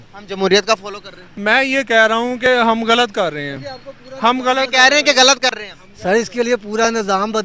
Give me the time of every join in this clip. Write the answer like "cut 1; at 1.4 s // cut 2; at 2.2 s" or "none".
none